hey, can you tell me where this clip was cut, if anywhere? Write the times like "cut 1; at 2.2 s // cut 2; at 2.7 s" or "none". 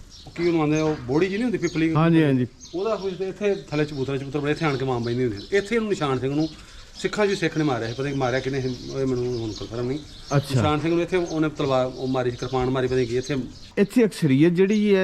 cut 1; at 13.7 s